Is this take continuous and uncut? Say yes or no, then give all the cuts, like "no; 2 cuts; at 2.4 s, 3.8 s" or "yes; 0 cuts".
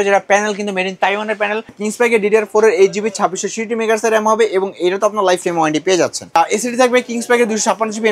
no; 2 cuts; at 1.8 s, 6.4 s